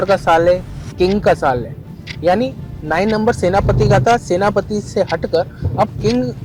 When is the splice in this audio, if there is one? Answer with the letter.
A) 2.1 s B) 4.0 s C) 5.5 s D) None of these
D